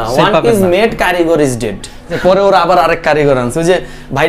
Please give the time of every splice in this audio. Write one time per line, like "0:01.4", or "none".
0:02.1